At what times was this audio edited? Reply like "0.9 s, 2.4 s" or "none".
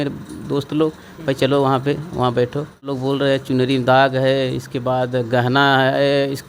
2.9 s